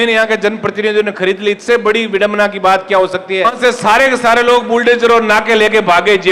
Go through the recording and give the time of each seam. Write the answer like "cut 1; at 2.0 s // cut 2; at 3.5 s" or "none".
cut 1; at 3.5 s